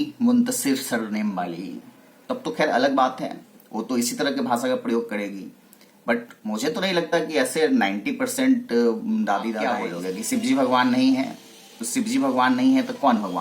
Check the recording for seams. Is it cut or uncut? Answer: cut